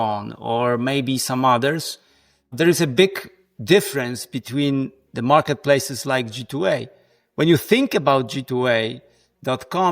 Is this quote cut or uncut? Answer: cut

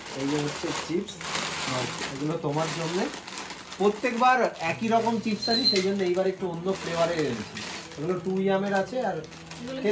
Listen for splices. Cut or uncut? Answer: uncut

